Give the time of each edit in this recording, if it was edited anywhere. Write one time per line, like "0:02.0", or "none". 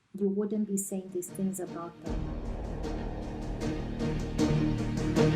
0:01.9